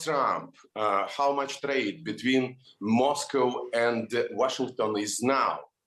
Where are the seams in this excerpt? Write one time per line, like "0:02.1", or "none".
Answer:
none